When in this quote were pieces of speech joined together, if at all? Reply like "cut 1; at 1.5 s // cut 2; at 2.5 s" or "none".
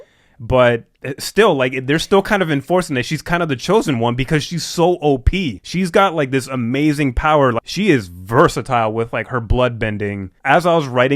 cut 1; at 7.6 s // cut 2; at 10.3 s